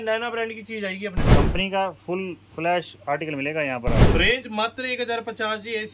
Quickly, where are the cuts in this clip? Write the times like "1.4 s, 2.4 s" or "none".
1.3 s, 4.1 s